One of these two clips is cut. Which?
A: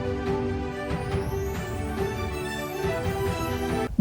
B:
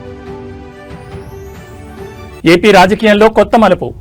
A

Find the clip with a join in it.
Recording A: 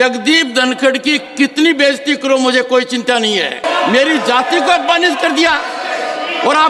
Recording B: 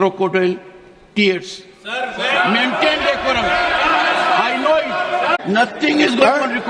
B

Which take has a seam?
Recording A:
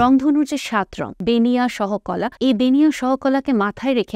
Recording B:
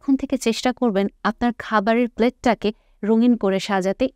A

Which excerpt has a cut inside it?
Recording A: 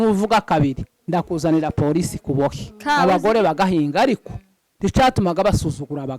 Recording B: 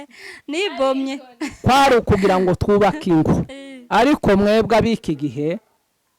A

